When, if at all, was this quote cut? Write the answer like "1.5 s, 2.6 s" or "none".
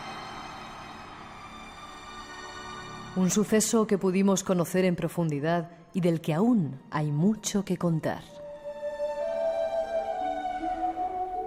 none